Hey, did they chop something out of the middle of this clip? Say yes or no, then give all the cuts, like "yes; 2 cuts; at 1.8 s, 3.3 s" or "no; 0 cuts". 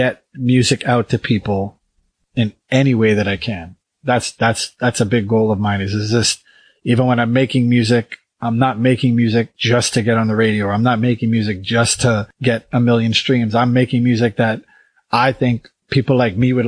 yes; 4 cuts; at 2.2 s, 9.6 s, 12.3 s, 15.7 s